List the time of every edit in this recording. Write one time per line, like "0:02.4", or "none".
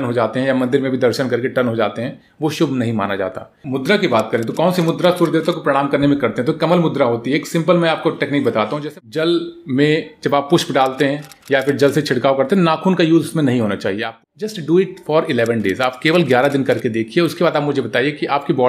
0:03.6
0:08.9
0:14.1